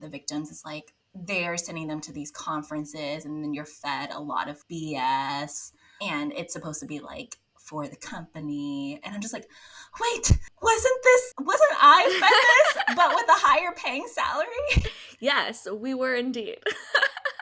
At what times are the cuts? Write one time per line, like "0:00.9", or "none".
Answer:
0:15.0